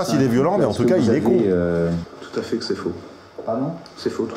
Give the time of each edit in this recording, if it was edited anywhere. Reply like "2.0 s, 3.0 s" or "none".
2.2 s